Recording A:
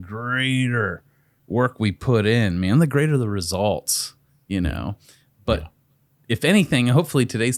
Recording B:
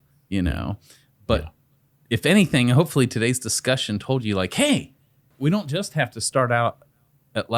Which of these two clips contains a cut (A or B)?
B